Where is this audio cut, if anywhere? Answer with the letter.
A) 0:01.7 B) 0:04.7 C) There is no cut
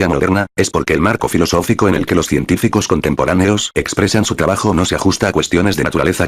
B